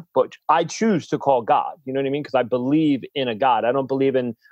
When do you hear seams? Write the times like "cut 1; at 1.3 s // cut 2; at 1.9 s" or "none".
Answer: none